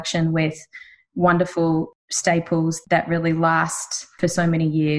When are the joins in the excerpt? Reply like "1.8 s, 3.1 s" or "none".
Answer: 1.9 s, 2.8 s, 4.1 s